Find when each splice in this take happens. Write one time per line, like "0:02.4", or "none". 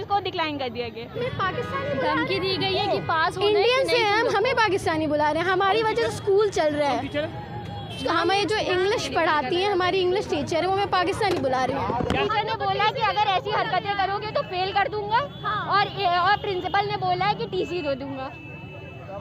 0:01.2
0:12.2